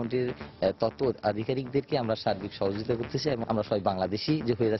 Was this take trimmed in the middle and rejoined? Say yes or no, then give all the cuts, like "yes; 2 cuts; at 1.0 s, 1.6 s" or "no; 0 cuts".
yes; 1 cut; at 3.4 s